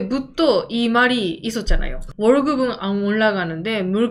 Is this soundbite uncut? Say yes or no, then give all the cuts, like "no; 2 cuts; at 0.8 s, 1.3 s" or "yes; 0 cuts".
yes; 0 cuts